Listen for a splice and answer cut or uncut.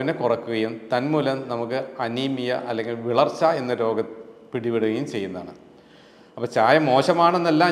uncut